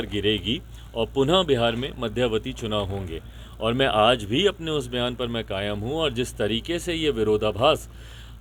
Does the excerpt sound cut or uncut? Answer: uncut